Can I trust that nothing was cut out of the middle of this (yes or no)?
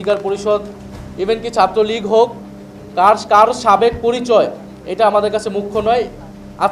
yes